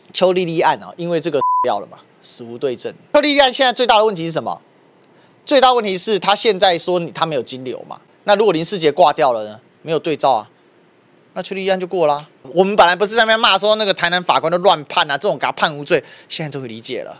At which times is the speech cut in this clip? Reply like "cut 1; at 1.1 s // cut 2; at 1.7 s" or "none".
cut 1; at 3.1 s // cut 2; at 8.1 s // cut 3; at 12.5 s

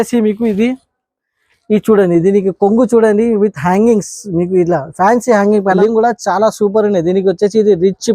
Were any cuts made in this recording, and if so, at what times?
cut 1; at 5.8 s

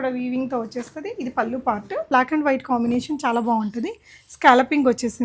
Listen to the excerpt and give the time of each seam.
cut 1; at 2.1 s

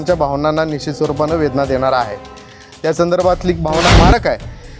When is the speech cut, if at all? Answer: cut 1; at 3.9 s

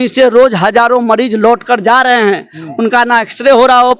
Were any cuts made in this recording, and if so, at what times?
none

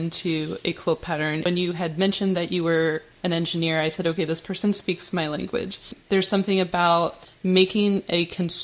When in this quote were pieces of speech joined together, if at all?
cut 1; at 1.4 s // cut 2; at 5.9 s // cut 3; at 7.2 s

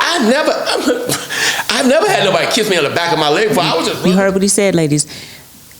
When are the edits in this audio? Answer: cut 1; at 3.9 s

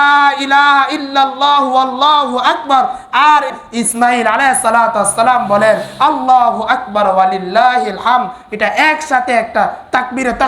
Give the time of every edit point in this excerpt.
cut 1; at 3.5 s

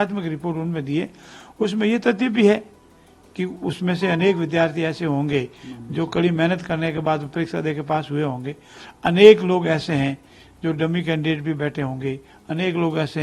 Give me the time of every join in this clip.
none

